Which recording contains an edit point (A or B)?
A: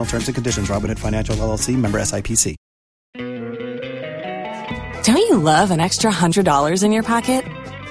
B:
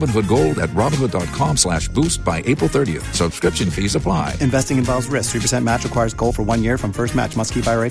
A